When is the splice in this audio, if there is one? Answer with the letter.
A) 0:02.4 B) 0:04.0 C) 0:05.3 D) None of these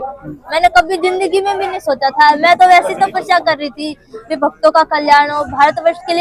D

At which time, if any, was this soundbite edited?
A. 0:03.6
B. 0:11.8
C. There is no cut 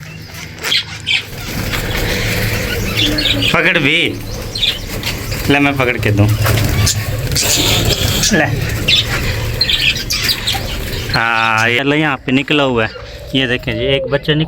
B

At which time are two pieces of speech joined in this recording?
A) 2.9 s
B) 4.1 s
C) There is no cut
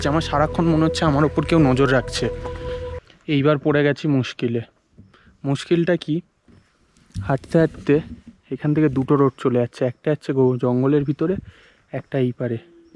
A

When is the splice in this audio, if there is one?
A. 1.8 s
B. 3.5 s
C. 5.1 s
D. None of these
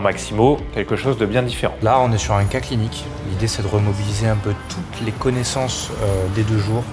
A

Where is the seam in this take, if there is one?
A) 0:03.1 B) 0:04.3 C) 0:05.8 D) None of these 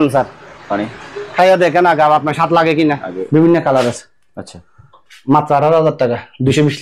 A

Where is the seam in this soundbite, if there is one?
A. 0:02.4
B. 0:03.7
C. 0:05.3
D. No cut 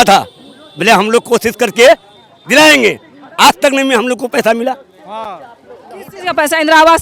D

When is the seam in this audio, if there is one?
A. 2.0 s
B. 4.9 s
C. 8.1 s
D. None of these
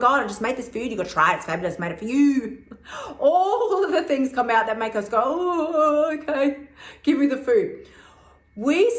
D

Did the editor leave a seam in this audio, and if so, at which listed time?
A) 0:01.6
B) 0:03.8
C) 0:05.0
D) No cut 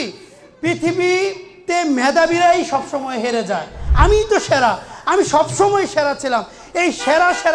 B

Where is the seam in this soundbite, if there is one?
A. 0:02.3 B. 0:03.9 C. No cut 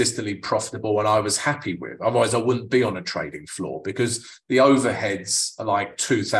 C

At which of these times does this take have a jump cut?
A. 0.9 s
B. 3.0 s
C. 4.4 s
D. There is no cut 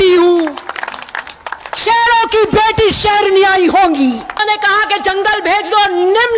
C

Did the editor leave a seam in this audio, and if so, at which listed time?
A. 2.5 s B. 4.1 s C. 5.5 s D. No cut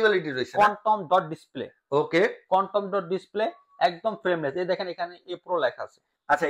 D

